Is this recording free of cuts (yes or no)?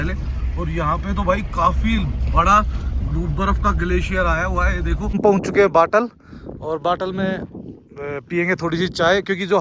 no